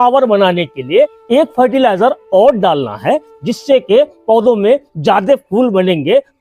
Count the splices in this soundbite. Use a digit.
1